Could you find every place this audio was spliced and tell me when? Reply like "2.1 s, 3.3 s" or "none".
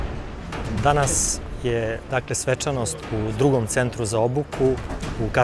4.2 s